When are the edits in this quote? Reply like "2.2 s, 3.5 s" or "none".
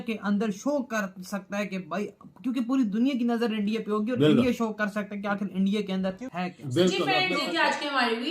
7.0 s